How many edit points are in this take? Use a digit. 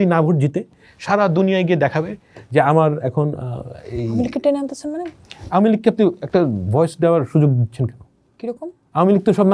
0